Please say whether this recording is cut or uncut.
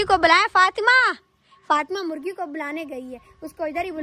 uncut